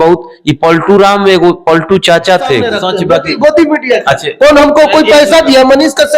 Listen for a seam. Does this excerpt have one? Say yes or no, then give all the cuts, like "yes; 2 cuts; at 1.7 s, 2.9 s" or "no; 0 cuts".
yes; 1 cut; at 2.8 s